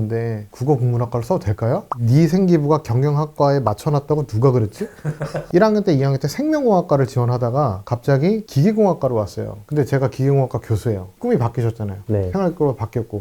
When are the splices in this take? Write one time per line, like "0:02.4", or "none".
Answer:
0:01.9
0:05.4